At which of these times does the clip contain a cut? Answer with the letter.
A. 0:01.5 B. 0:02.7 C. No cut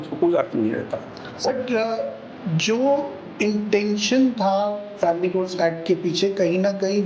A